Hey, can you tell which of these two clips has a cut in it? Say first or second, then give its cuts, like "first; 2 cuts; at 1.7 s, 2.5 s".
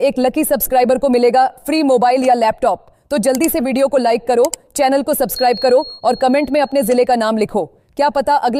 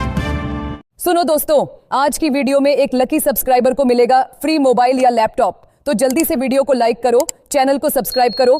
second; 1 cut; at 0.9 s